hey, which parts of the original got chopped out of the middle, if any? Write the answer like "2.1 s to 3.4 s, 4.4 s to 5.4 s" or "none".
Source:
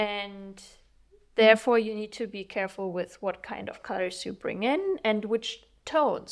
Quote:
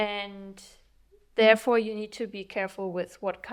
none